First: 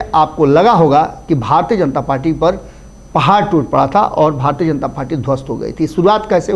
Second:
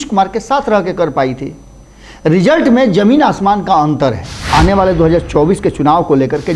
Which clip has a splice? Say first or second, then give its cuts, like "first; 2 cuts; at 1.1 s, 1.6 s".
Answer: second; 1 cut; at 4.3 s